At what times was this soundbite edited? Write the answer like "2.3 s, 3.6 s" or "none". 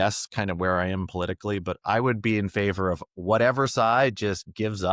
none